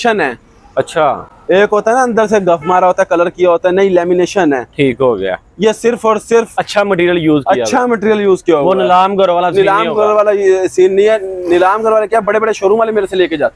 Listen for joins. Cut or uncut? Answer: uncut